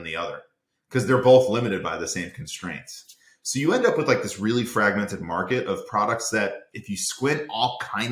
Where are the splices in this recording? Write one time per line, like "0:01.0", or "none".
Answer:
none